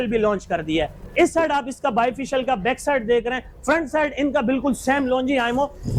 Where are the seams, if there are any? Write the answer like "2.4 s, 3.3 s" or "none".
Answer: none